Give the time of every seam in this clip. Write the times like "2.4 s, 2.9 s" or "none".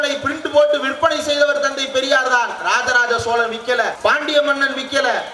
none

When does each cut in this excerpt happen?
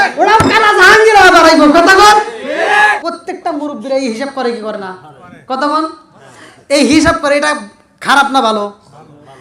3.0 s

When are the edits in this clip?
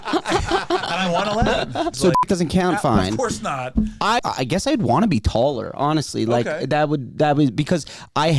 1.9 s, 4.2 s

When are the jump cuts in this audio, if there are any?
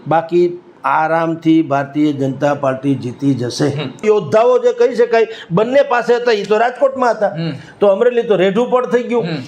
4.0 s

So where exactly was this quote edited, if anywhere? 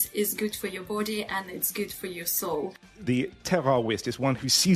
2.9 s

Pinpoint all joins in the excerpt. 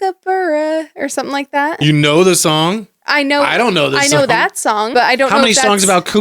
4.9 s

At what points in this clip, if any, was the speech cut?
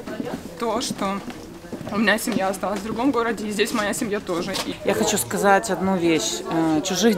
4.7 s

